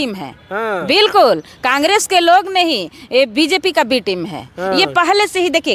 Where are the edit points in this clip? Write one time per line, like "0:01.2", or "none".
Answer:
none